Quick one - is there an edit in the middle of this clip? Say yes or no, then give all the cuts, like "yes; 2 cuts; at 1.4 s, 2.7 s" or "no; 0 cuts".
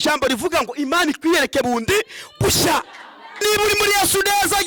yes; 1 cut; at 3.4 s